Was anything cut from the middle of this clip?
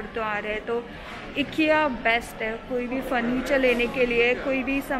no; 0 cuts

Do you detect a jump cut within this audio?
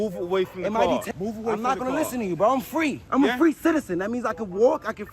yes; 2 cuts; at 1.1 s, 3.0 s

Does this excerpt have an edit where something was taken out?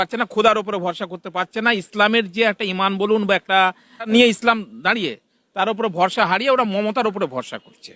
yes; 1 cut; at 4.1 s

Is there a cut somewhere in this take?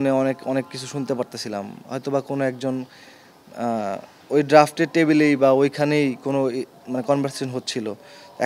no; 0 cuts

